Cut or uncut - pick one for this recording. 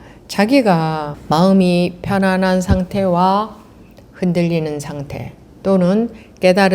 cut